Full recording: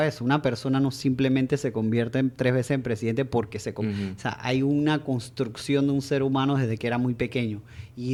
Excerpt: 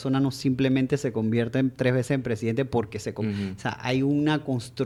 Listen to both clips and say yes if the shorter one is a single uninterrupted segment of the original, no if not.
yes